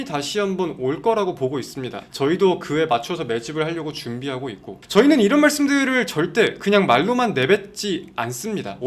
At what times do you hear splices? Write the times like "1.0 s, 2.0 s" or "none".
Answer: none